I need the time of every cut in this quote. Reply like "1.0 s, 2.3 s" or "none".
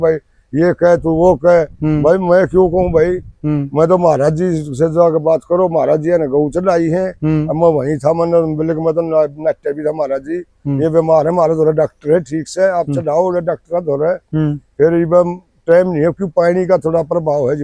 none